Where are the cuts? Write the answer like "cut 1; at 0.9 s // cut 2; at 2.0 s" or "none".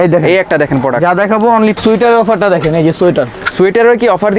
cut 1; at 1.8 s